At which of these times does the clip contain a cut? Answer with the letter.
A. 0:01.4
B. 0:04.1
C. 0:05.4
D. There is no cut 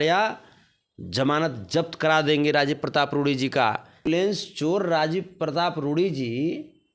B